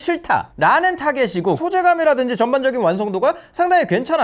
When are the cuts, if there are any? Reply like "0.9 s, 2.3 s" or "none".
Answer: 1.6 s